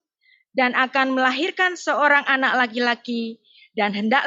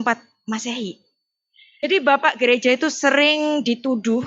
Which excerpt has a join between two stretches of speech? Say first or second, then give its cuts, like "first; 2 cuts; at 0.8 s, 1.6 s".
second; 1 cut; at 1.8 s